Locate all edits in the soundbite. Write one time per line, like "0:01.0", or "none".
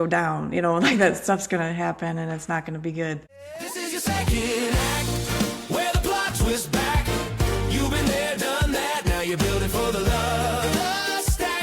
0:03.4

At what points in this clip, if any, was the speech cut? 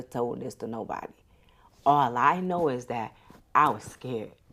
none

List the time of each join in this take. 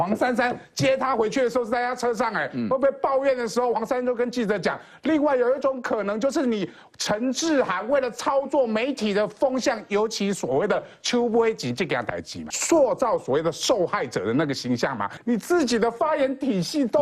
0:12.5
0:15.1

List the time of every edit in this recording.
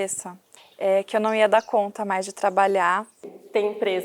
0:03.1

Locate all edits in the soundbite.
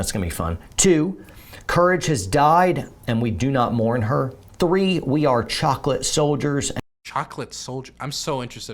0:07.0

